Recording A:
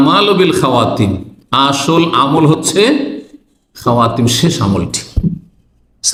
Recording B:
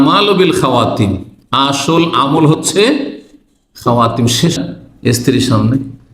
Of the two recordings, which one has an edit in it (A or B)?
B